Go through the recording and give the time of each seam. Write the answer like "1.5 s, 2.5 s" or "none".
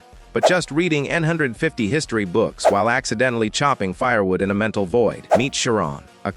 5.2 s